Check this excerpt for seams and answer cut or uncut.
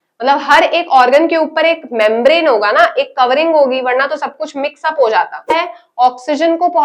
cut